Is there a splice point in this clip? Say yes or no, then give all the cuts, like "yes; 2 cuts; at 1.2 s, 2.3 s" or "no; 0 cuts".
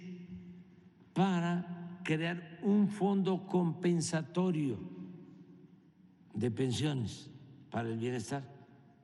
no; 0 cuts